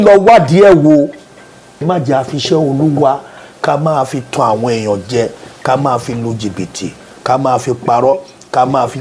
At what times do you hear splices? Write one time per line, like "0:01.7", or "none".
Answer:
0:01.6